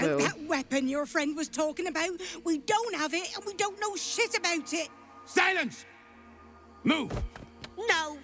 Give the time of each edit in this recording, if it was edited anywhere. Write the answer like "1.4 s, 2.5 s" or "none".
none